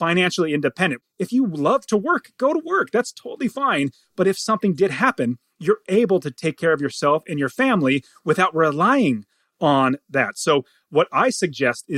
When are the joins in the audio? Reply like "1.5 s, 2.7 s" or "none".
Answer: 1.0 s

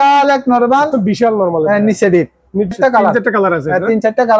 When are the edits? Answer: 2.7 s

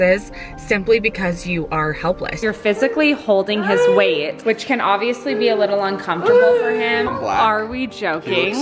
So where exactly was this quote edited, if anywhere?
2.4 s, 4.3 s, 7.1 s

